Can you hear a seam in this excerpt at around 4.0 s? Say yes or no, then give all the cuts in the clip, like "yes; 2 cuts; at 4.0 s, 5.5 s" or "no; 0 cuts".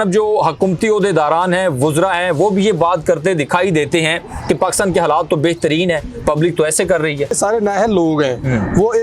no; 1 cut; at 7.3 s